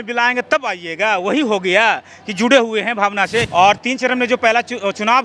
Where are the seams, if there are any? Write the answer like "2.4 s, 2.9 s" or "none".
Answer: 3.5 s